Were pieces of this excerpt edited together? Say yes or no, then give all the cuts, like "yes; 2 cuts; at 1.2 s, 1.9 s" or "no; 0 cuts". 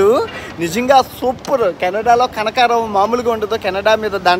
no; 0 cuts